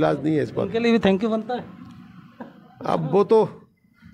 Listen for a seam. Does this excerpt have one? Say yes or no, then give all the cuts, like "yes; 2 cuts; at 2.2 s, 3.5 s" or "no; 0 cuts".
no; 0 cuts